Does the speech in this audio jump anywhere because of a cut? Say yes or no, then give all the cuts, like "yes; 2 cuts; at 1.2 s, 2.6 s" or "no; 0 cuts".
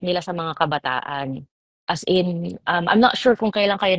no; 0 cuts